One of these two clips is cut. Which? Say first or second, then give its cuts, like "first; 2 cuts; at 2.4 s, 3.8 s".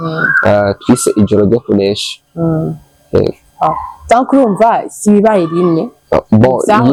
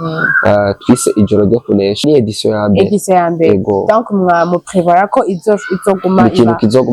second; 1 cut; at 2.0 s